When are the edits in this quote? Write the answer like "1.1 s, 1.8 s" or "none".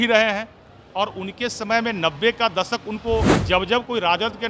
3.4 s

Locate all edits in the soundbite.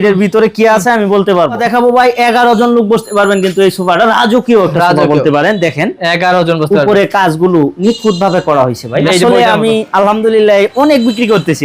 1.6 s, 9.1 s

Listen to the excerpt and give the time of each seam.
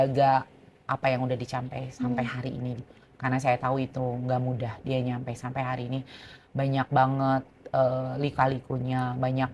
none

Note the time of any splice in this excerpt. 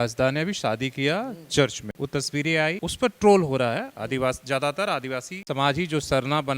1.8 s, 2.9 s, 5.3 s

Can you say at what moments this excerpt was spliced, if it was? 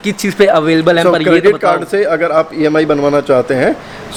none

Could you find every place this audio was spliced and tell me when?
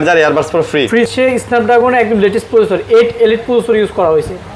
1.1 s

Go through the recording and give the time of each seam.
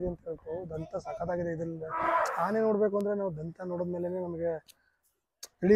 none

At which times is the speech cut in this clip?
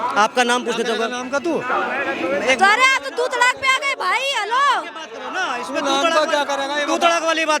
none

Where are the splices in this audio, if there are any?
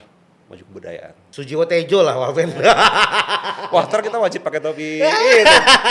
1.3 s

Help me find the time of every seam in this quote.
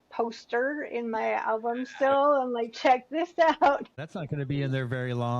3.9 s

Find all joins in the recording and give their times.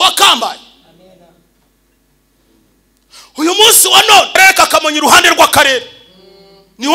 4.4 s

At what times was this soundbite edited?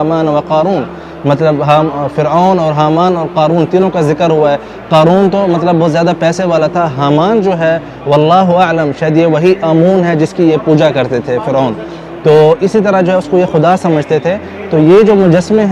none

